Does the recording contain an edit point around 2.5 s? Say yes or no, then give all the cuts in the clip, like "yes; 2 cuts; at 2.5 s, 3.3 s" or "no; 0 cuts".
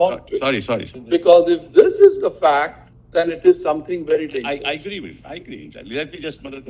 no; 1 cut; at 0.9 s